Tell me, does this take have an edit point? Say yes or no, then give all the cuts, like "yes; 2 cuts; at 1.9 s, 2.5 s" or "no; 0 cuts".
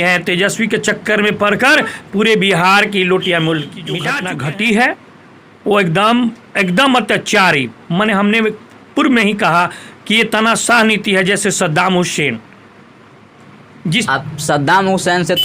yes; 1 cut; at 4.1 s